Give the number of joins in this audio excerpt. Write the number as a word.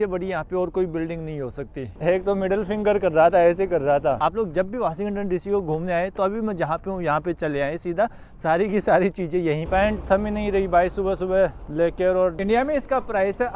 four